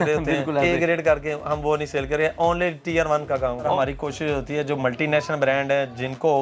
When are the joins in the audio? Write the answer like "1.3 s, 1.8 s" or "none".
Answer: 3.7 s

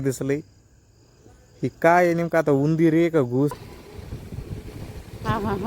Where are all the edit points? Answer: 3.6 s

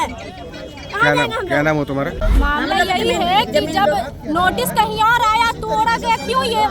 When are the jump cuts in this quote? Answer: 2.2 s

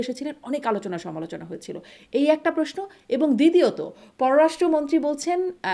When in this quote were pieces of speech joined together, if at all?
none

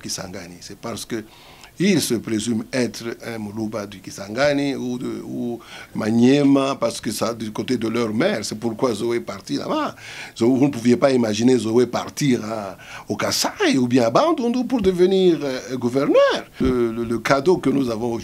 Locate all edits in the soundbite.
16.5 s

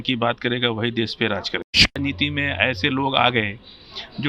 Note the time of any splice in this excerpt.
2.0 s

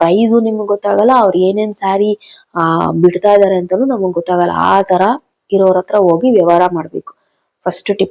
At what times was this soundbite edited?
none

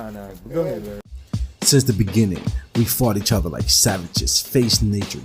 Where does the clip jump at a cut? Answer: 1.1 s

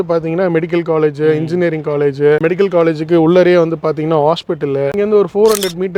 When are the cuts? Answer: 2.4 s, 4.9 s

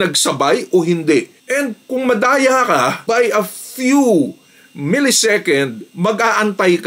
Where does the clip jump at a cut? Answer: none

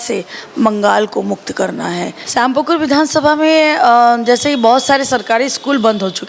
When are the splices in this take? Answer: 2.2 s

